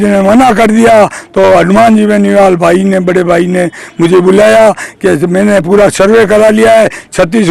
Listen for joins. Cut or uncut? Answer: uncut